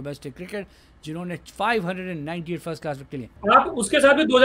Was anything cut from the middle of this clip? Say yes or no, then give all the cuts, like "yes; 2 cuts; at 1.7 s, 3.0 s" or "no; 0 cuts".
yes; 1 cut; at 3.2 s